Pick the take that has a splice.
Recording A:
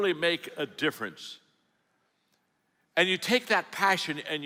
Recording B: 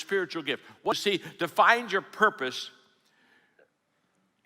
B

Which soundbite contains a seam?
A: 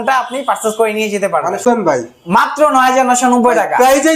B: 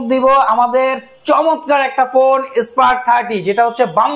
A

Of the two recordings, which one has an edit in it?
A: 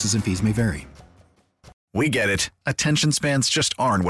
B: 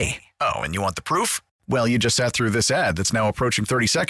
A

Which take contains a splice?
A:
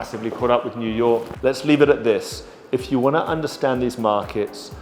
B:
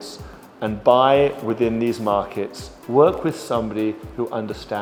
A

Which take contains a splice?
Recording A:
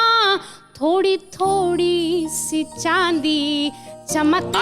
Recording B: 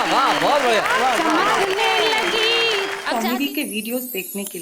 B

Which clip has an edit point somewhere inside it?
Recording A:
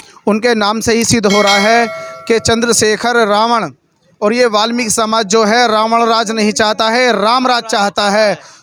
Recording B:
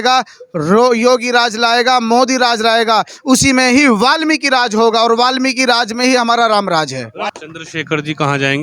B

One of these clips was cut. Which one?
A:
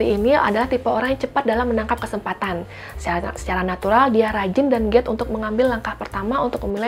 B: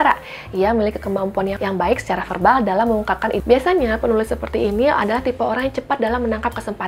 B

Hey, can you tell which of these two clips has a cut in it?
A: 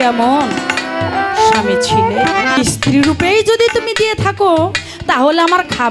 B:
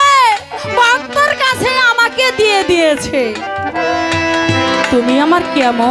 A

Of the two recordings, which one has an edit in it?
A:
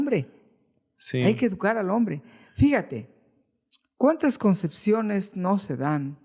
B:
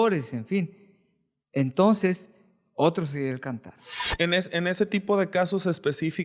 B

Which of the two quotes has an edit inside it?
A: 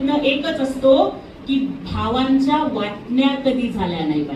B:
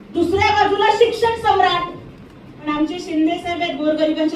B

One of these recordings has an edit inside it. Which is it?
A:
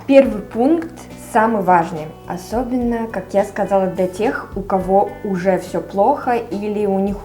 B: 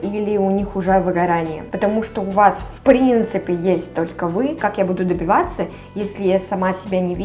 B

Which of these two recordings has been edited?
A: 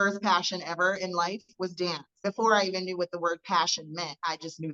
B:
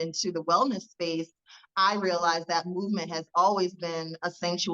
A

